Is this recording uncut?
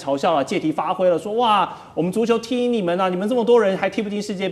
yes; 0 cuts

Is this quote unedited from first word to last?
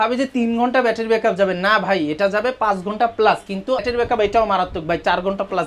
no; 1 cut; at 3.8 s

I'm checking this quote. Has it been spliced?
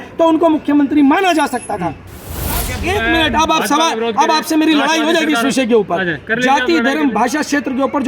yes; 1 cut; at 2.7 s

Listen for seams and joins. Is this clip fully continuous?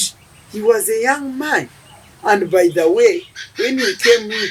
yes; 0 cuts

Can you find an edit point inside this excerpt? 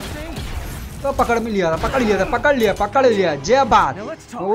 yes; 1 cut; at 1.0 s

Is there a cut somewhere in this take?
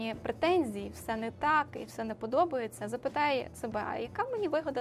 no; 0 cuts

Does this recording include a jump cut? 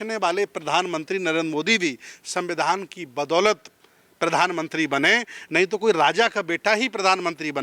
no; 0 cuts

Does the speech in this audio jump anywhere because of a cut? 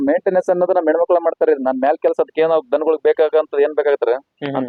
no; 0 cuts

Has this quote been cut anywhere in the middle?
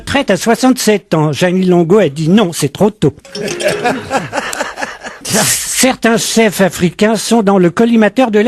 yes; 1 cut; at 2.3 s

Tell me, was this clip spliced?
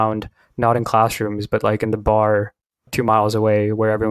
no; 0 cuts

